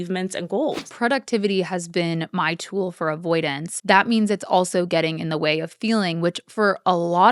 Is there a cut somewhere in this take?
yes; 2 cuts; at 0.9 s, 3.7 s

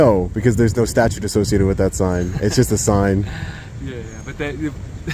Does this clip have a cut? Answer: no; 0 cuts

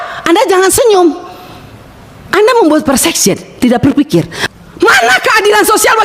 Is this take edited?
yes; 1 cut; at 4.4 s

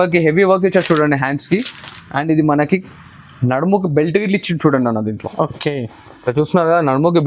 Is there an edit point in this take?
no; 0 cuts

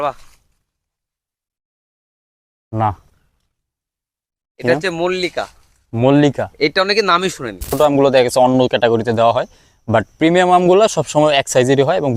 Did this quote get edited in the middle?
yes; 1 cut; at 7.7 s

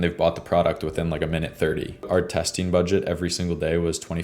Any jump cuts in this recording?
yes; 1 cut; at 2.1 s

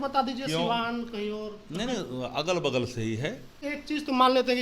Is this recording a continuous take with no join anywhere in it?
no; 1 cut; at 3.6 s

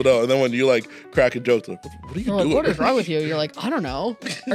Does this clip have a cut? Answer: no; 0 cuts

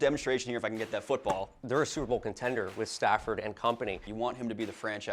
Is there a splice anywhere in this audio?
yes; 2 cuts; at 1.6 s, 4.1 s

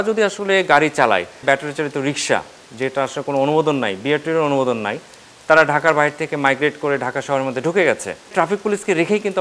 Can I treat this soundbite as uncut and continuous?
no; 2 cuts; at 1.4 s, 8.3 s

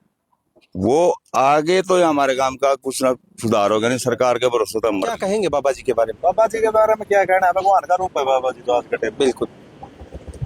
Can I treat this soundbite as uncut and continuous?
no; 1 cut; at 5.1 s

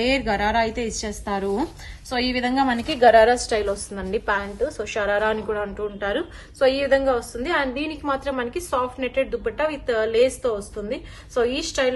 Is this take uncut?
yes; 0 cuts

